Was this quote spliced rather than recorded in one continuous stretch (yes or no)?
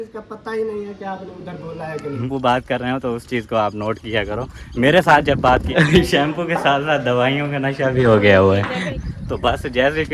yes